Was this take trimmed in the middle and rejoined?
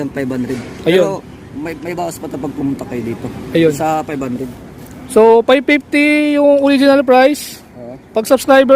no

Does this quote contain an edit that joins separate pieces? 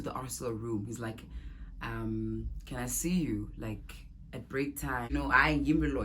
yes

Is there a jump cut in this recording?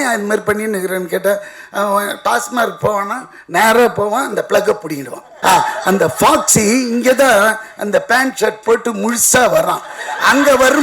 yes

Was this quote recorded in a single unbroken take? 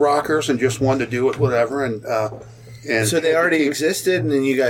yes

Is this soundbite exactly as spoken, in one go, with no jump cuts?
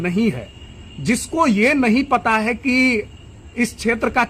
yes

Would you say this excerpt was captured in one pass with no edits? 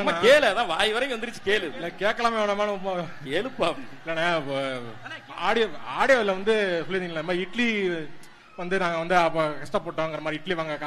yes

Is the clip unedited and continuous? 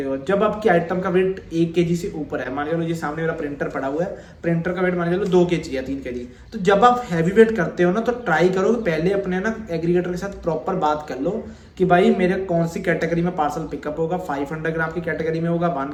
yes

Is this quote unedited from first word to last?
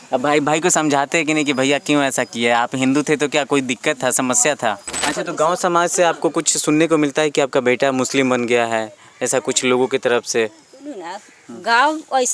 no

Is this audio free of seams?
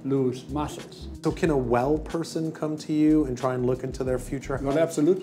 no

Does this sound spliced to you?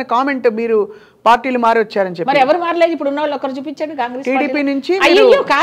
no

